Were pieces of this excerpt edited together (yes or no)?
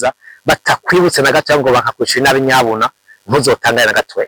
no